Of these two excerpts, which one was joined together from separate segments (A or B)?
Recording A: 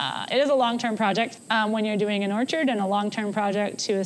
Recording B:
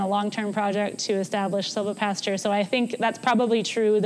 A